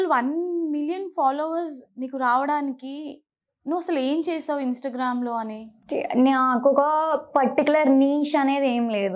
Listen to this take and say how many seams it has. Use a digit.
1